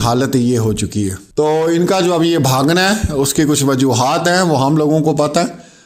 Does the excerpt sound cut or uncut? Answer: cut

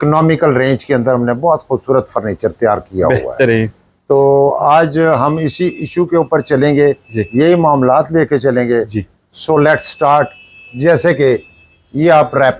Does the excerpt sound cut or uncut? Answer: uncut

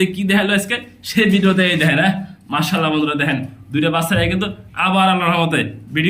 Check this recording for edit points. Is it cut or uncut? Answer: uncut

